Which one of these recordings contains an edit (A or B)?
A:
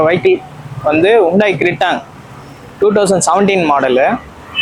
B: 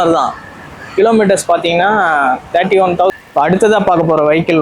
B